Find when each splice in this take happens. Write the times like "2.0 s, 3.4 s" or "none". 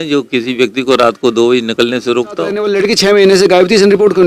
2.6 s